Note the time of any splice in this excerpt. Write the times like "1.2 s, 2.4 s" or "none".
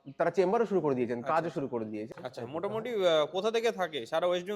2.1 s